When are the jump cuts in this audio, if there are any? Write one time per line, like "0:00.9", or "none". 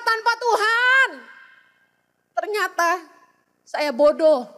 none